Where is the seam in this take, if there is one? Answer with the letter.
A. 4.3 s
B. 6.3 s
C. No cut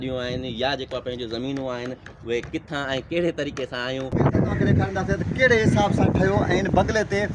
A